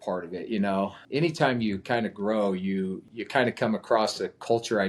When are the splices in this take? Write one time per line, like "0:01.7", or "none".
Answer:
0:01.0
0:03.1